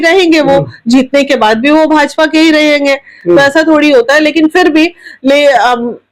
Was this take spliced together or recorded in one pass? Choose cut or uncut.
uncut